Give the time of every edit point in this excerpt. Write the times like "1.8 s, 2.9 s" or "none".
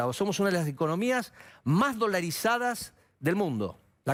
none